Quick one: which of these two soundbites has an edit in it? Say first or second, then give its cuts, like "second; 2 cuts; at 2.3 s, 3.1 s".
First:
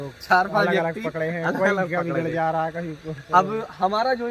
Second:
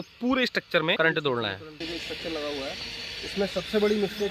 second; 2 cuts; at 1.0 s, 1.9 s